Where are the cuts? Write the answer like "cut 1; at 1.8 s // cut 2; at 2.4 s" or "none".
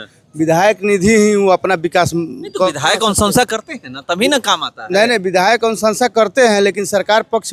none

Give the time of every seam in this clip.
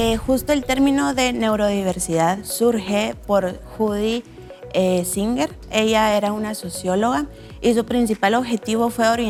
none

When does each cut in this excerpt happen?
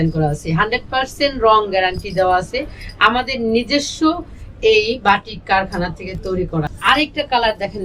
cut 1; at 6.7 s

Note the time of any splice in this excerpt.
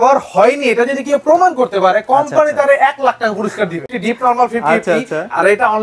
cut 1; at 3.8 s

